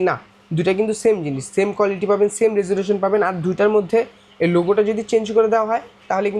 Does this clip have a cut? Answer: no; 0 cuts

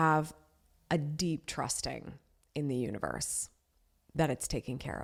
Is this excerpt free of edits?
yes; 0 cuts

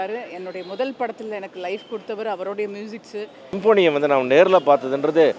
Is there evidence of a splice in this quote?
yes; 1 cut; at 3.5 s

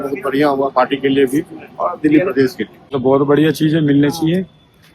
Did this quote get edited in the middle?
yes; 1 cut; at 2.8 s

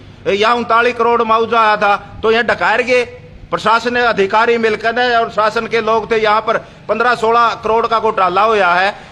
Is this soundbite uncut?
yes; 0 cuts

